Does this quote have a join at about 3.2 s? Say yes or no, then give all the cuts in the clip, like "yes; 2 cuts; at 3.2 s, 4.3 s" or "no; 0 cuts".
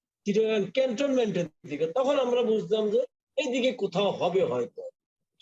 no; 0 cuts